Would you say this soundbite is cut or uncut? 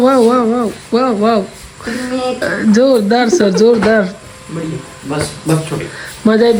uncut